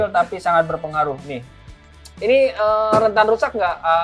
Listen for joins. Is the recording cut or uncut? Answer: uncut